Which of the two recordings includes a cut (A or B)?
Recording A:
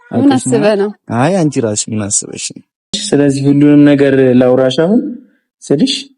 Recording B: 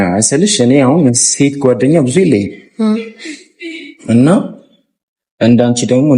A